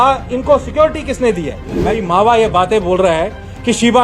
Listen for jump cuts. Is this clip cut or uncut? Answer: cut